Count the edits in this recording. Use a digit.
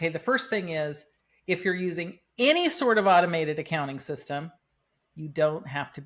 0